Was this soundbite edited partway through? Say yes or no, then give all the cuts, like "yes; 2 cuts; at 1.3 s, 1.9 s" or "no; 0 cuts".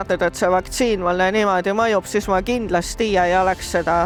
no; 0 cuts